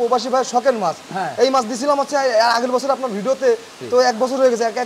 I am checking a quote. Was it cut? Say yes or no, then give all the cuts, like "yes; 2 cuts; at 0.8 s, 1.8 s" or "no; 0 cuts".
no; 0 cuts